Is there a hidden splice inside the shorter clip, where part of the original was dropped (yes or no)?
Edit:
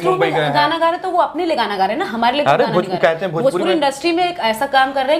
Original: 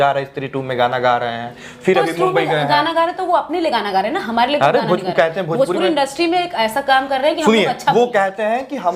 no